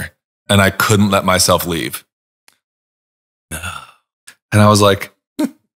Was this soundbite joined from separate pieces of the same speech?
no; 0 cuts

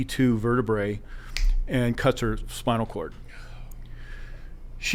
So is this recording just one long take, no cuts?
yes; 0 cuts

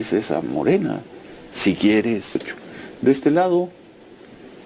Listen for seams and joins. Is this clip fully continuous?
no; 1 cut; at 2.5 s

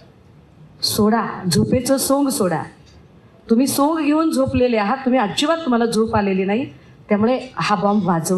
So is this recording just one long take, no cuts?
yes; 0 cuts

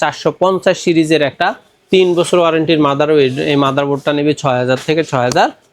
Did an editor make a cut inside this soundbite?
no; 0 cuts

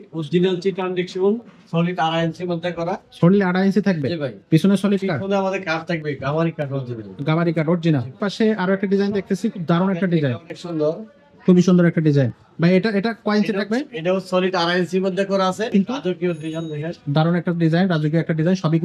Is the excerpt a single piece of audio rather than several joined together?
no; 2 cuts; at 8.2 s, 15.7 s

